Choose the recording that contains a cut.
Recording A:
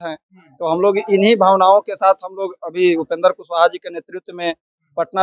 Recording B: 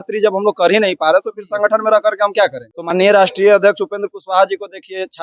B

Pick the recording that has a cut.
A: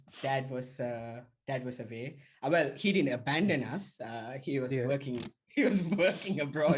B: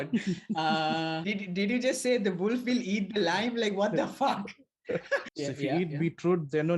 B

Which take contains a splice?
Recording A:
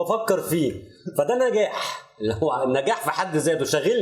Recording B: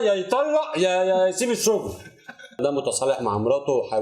B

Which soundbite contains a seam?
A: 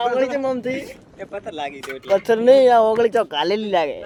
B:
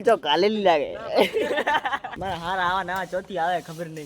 B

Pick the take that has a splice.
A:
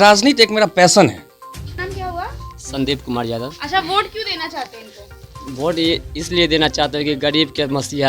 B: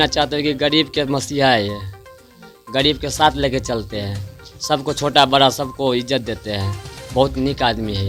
A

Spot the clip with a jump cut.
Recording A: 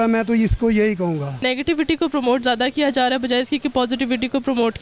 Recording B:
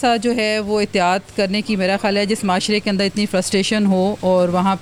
A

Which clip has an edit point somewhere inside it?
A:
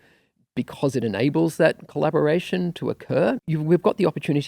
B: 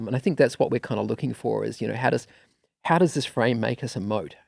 A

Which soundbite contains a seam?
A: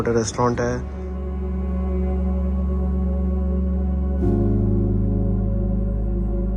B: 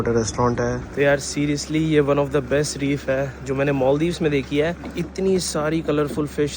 B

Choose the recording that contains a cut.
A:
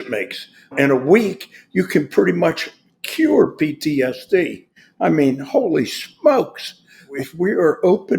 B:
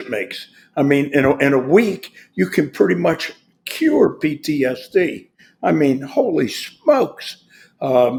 A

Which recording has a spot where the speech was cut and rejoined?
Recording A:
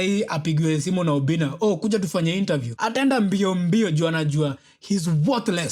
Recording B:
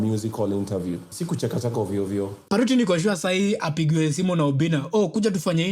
B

